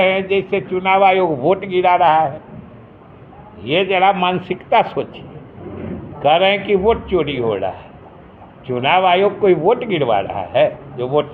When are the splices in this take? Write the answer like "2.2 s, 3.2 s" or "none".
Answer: none